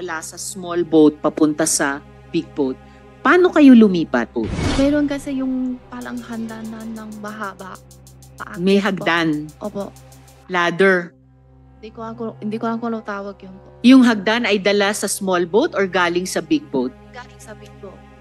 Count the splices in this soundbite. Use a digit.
1